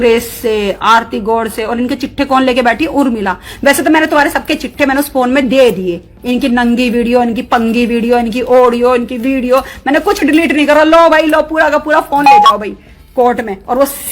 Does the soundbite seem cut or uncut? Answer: uncut